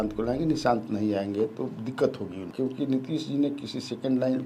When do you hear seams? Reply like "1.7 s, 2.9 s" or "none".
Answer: 2.5 s